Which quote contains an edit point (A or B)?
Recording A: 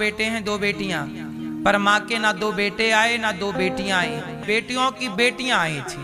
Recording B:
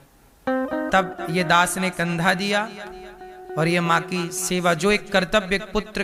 A